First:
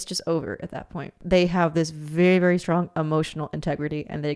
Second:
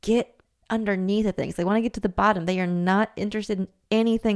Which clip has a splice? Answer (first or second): first